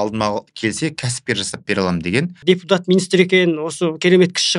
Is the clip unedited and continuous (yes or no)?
no